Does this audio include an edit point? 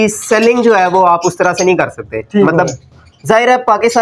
no; 0 cuts

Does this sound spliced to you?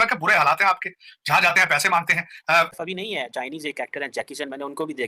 yes; 1 cut; at 2.7 s

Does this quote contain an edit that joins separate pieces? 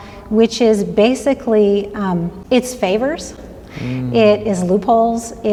no; 0 cuts

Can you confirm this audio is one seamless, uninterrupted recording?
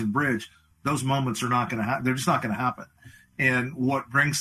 yes; 0 cuts

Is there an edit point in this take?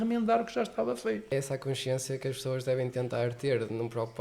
yes; 1 cut; at 1.3 s

